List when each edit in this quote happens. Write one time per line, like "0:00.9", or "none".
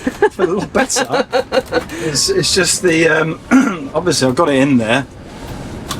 none